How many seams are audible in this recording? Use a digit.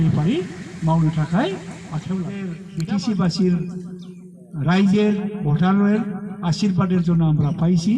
1